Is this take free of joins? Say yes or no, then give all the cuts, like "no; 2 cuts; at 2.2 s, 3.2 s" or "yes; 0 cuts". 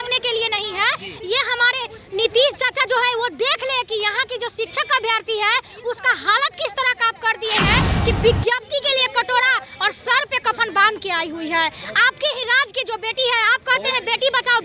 yes; 0 cuts